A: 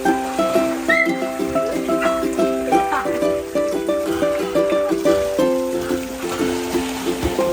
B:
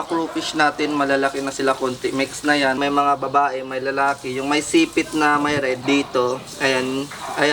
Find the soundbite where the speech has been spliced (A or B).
B